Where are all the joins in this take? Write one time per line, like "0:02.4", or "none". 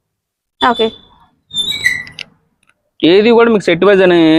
none